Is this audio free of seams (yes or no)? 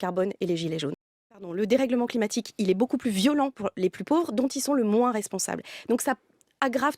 no